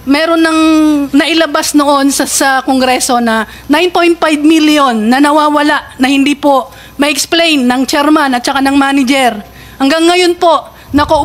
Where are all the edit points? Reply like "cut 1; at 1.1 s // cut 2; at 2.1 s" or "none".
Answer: none

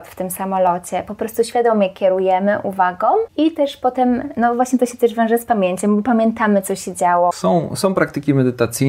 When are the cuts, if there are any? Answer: cut 1; at 3.3 s // cut 2; at 7.3 s

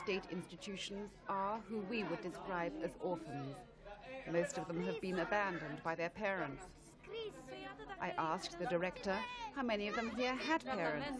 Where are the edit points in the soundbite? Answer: cut 1; at 9.4 s

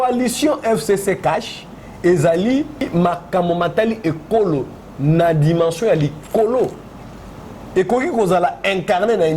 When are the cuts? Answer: cut 1; at 2.9 s

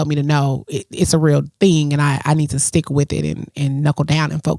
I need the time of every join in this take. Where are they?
none

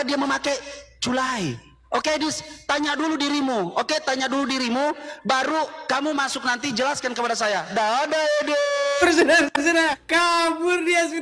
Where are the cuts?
cut 1; at 10.0 s

